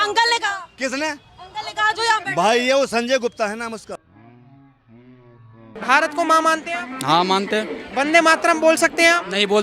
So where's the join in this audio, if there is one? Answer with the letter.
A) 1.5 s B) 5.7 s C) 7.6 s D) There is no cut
B